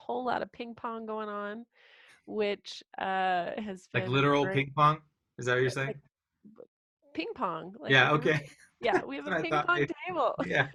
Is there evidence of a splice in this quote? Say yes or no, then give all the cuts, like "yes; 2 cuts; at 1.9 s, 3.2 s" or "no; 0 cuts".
no; 0 cuts